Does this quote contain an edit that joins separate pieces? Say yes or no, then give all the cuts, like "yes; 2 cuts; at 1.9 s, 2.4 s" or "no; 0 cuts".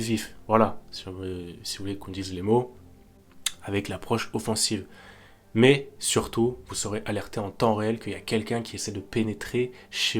no; 0 cuts